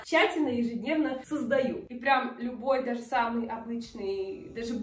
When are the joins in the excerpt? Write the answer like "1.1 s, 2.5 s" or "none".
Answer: 1.8 s